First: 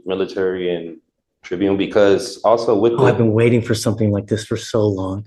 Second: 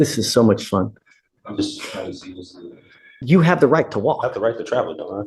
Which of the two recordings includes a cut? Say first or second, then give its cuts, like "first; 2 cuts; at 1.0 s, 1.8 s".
second; 1 cut; at 3.1 s